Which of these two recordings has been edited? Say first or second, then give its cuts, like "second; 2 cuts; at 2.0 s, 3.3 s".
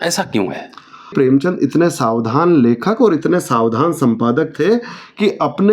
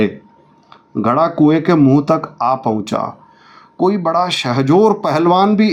first; 1 cut; at 1.1 s